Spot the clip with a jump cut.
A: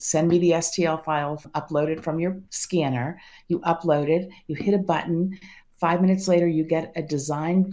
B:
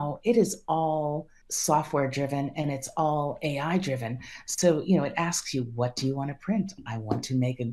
A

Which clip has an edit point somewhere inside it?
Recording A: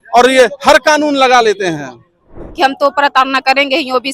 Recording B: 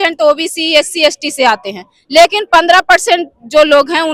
A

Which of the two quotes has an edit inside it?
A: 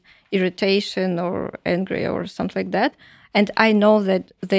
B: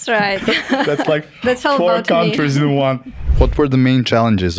B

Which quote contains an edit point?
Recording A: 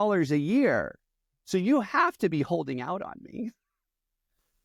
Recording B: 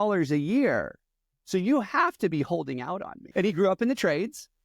B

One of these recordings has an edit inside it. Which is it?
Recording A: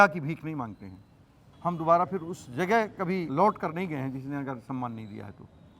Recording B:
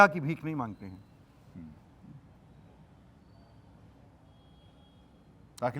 A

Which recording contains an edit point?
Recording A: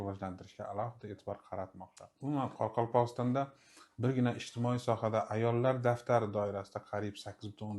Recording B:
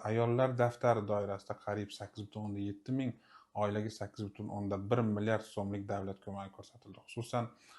A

